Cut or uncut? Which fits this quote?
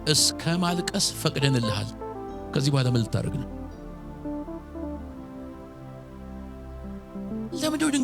uncut